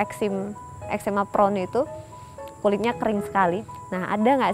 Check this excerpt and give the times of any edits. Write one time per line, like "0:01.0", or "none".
0:03.6